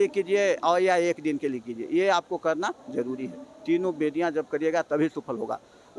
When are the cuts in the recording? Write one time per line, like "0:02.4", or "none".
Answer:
none